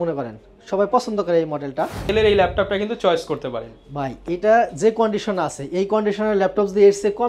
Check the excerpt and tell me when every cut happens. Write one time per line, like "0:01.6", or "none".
0:02.0

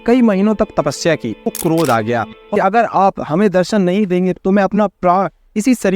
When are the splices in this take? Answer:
0:01.5
0:02.4

